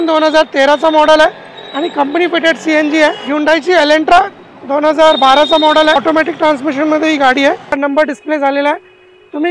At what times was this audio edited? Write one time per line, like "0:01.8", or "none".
0:03.2
0:06.0
0:07.7